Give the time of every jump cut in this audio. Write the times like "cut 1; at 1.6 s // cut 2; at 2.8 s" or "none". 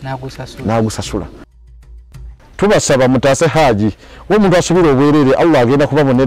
cut 1; at 1.9 s